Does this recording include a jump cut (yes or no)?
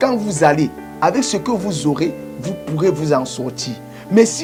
no